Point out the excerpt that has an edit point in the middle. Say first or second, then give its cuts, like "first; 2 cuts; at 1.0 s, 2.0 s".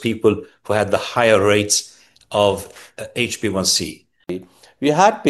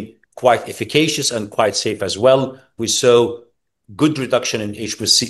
first; 1 cut; at 4.4 s